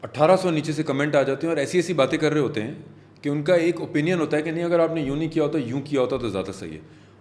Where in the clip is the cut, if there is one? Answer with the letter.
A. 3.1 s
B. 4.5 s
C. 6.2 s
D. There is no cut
D